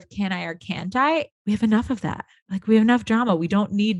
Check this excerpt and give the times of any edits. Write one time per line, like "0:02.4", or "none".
0:01.3